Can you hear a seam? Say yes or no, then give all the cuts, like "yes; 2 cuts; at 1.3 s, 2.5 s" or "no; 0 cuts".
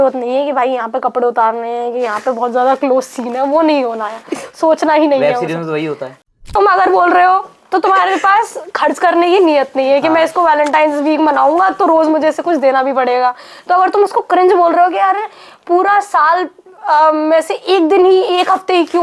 yes; 1 cut; at 6.5 s